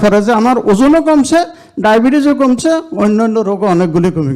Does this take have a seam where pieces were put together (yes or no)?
no